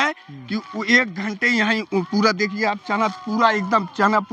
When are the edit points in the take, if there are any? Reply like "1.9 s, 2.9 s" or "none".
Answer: none